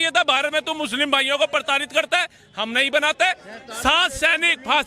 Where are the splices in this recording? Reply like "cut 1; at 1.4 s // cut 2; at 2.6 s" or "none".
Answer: none